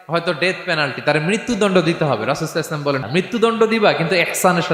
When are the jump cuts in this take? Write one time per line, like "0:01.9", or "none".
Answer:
0:03.1